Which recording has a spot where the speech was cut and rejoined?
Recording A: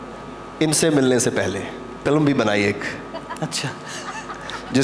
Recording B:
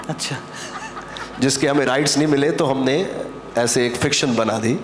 A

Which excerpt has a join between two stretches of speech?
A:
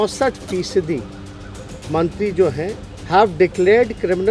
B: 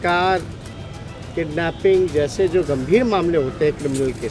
A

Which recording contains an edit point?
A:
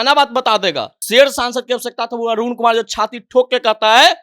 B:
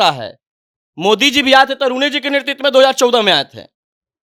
A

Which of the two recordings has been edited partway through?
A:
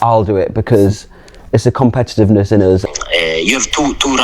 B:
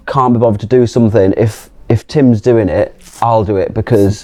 A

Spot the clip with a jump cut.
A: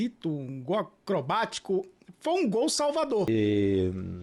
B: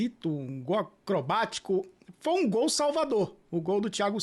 A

